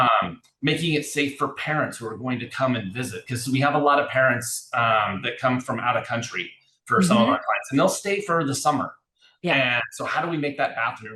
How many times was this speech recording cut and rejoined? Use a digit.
0